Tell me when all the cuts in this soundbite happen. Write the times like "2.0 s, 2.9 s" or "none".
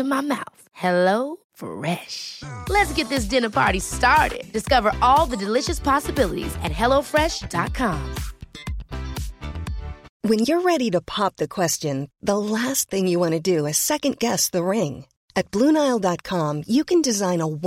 10.1 s